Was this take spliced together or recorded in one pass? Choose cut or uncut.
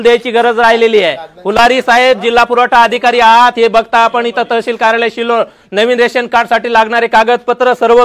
uncut